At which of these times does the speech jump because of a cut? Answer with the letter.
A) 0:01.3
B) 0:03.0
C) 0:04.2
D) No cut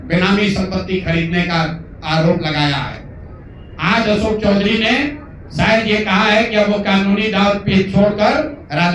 D